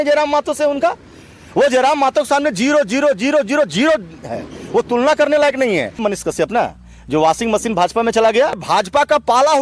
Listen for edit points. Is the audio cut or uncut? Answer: cut